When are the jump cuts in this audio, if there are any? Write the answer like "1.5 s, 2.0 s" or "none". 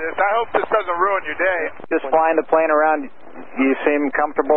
1.8 s